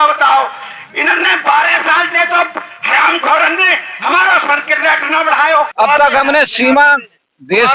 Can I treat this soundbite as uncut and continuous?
no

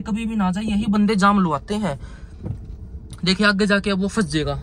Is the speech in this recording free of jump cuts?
yes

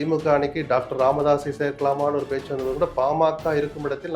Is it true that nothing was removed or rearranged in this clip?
yes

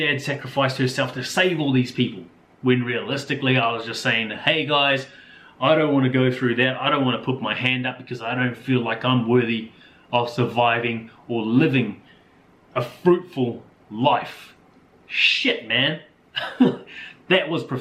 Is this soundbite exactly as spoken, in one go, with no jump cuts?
yes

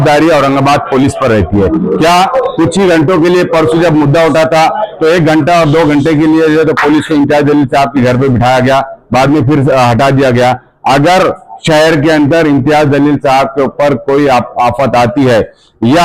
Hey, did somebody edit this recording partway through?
no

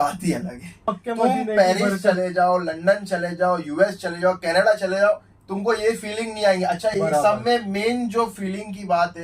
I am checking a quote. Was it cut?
yes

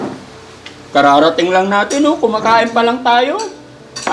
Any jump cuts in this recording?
no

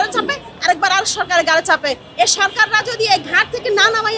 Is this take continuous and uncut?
yes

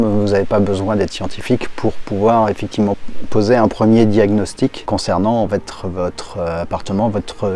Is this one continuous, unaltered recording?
no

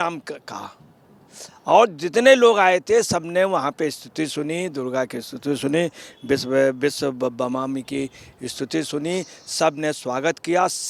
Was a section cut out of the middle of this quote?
no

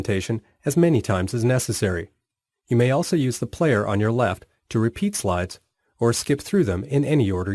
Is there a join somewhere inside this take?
yes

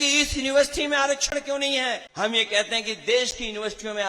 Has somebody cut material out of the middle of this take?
yes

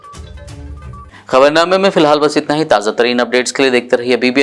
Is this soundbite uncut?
yes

